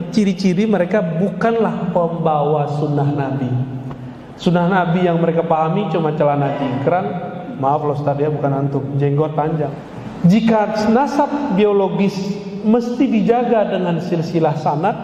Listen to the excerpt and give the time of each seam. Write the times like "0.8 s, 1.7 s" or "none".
9.9 s